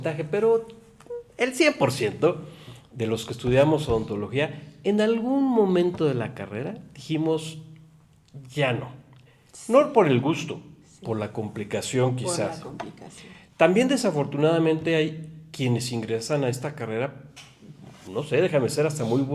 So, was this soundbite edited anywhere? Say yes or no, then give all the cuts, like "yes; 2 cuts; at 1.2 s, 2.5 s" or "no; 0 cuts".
no; 0 cuts